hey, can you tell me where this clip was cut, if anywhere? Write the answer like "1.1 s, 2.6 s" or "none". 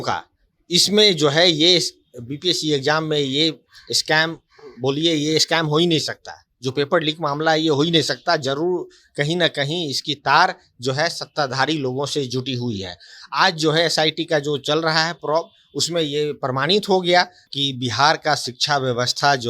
17.4 s